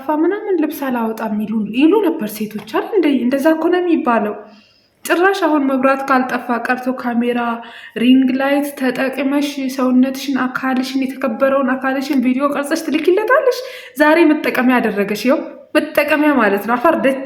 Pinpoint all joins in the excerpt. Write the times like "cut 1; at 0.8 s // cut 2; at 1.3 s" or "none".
none